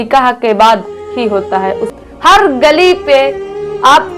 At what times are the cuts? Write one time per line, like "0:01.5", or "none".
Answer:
0:01.9

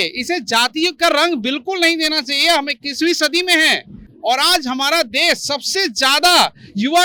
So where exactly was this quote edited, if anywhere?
none

